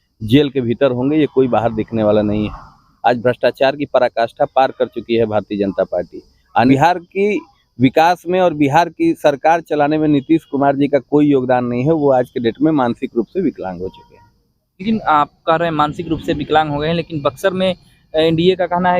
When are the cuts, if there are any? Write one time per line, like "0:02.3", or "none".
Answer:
0:06.7